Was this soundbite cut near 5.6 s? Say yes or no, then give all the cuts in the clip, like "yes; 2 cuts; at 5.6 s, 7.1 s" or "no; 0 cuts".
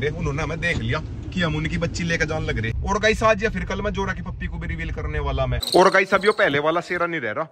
yes; 2 cuts; at 2.7 s, 5.6 s